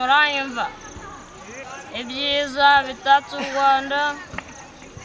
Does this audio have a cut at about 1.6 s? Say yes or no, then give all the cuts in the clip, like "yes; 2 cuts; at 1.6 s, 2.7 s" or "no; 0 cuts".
yes; 1 cut; at 1.6 s